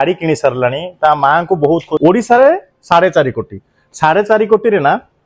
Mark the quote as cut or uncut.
cut